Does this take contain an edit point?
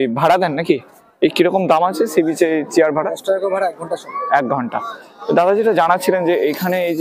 no; 0 cuts

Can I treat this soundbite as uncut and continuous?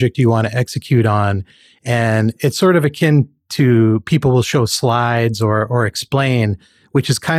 yes; 0 cuts

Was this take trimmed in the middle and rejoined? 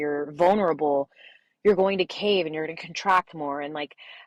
no; 0 cuts

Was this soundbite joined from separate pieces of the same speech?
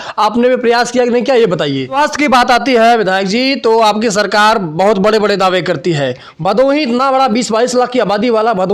yes; 1 cut; at 1.9 s

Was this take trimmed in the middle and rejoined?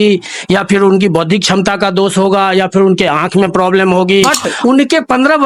yes; 1 cut; at 4.3 s

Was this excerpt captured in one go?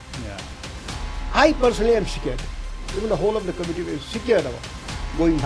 yes; 0 cuts

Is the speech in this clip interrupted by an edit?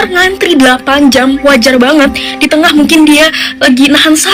no; 0 cuts

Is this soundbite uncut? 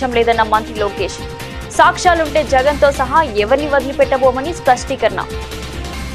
no; 1 cut; at 5.2 s

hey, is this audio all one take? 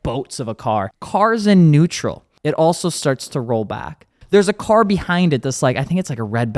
no; 3 cuts; at 1.0 s, 2.3 s, 4.2 s

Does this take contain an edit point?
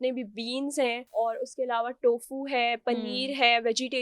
yes; 1 cut; at 1.0 s

